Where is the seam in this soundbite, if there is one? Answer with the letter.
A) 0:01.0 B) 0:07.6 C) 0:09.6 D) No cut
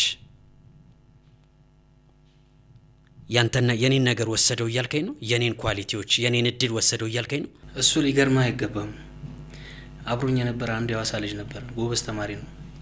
B